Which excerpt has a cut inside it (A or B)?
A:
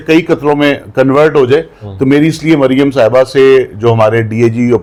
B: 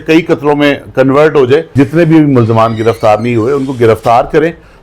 B